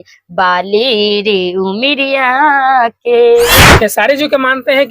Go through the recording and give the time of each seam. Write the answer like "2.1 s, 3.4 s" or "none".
3.6 s